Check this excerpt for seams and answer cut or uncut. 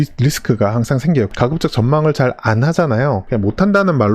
cut